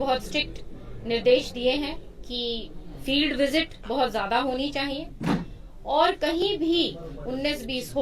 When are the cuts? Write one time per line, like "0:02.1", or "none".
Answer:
none